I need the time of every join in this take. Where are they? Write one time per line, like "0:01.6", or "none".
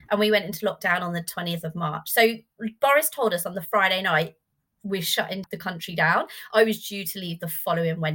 0:05.4